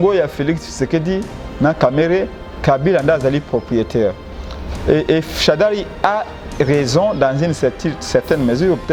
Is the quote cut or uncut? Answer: uncut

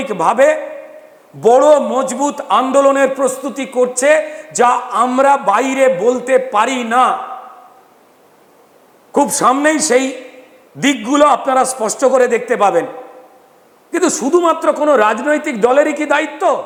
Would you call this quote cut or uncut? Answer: uncut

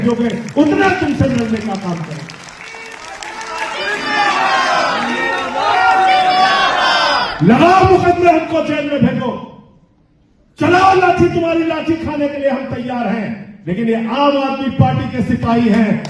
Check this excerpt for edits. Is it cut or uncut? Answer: uncut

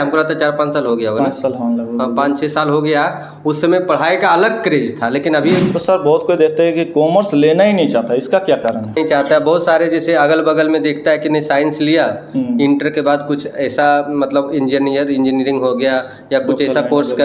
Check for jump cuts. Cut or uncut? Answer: cut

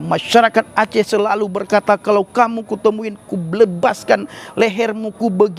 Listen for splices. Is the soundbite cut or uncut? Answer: uncut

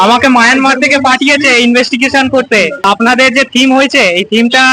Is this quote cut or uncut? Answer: cut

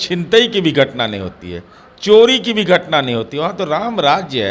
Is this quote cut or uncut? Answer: uncut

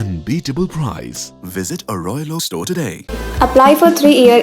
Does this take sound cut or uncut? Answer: uncut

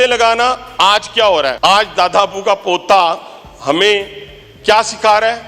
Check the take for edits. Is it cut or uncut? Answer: cut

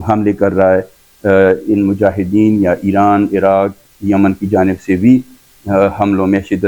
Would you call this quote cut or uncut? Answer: uncut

